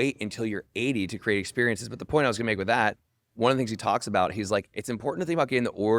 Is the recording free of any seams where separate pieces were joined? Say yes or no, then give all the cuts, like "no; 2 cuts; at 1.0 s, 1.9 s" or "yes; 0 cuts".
yes; 0 cuts